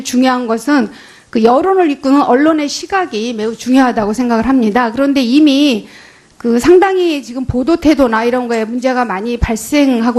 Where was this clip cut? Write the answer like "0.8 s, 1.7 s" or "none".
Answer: 1.5 s